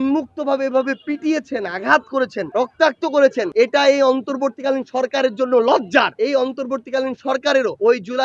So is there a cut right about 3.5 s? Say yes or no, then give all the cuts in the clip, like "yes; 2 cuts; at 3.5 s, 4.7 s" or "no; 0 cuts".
yes; 2 cuts; at 3.5 s, 6.1 s